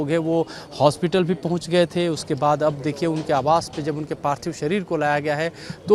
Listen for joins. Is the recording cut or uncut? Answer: uncut